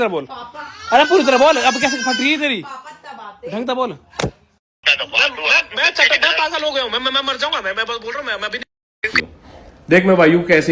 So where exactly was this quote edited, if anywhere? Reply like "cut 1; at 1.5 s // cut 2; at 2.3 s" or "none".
cut 1; at 4.7 s // cut 2; at 9.2 s